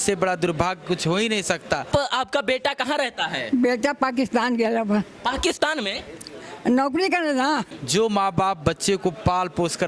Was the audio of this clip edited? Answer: yes; 2 cuts; at 1.9 s, 7.7 s

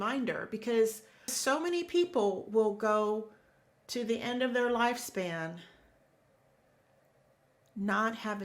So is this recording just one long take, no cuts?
no; 1 cut; at 1.4 s

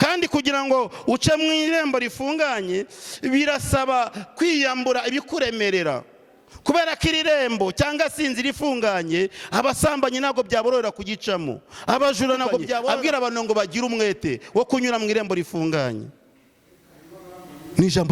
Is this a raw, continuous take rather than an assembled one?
no; 1 cut; at 12.9 s

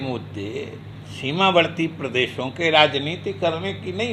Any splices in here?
no; 0 cuts

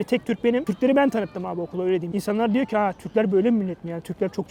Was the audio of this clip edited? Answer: no; 0 cuts

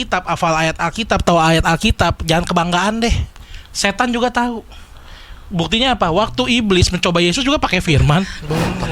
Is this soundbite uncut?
yes; 0 cuts

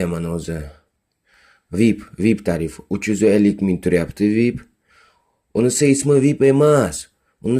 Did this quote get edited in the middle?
yes; 1 cut; at 2.0 s

